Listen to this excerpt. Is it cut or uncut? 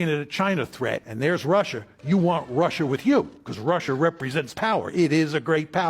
cut